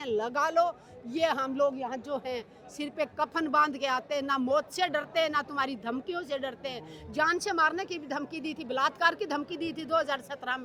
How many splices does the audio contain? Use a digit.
0